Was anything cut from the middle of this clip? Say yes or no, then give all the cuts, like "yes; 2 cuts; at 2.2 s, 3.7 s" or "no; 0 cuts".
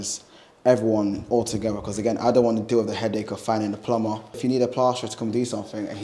yes; 1 cut; at 4.4 s